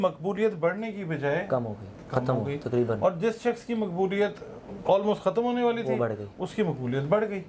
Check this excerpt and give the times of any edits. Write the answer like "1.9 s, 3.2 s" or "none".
none